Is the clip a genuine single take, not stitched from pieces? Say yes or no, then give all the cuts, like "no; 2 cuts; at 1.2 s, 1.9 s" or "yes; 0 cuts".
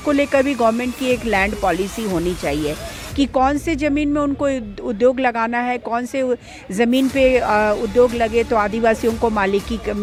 yes; 0 cuts